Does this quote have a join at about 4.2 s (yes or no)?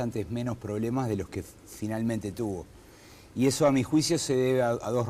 no